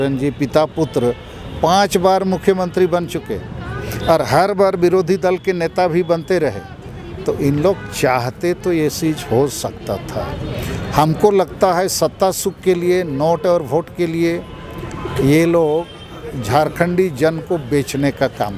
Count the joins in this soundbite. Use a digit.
0